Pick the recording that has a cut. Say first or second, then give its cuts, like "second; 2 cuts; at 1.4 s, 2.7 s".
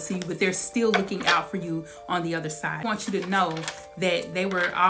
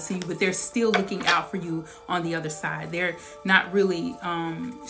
first; 1 cut; at 2.8 s